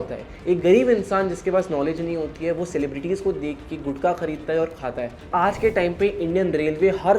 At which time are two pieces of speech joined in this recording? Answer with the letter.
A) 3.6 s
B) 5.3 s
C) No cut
B